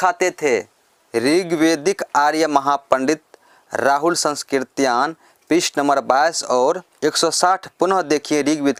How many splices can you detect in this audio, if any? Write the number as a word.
zero